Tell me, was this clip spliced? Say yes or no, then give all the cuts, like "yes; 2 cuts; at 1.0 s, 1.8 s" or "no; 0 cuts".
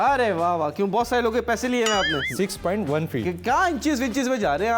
yes; 1 cut; at 2.2 s